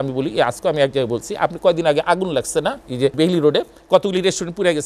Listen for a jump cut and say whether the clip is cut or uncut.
cut